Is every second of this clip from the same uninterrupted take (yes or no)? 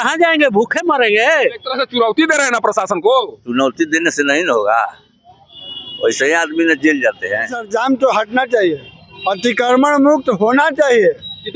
no